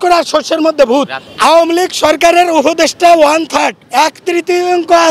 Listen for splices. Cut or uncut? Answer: cut